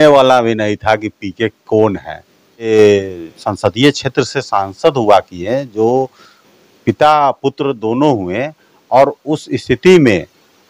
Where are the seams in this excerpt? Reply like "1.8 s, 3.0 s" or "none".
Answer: 2.7 s